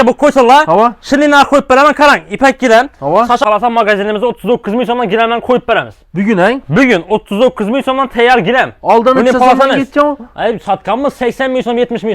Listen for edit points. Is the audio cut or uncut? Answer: cut